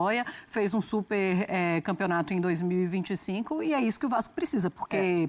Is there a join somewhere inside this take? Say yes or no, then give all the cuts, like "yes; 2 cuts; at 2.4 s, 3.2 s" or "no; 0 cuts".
no; 0 cuts